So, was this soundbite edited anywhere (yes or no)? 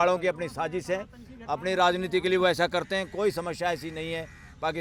no